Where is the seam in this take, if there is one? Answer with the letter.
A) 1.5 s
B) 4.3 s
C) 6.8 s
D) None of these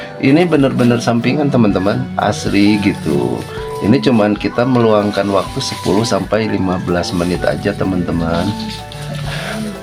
D